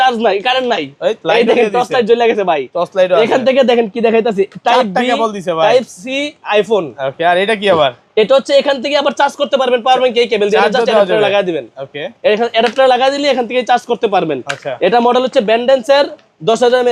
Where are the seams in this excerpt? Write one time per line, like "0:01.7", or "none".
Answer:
none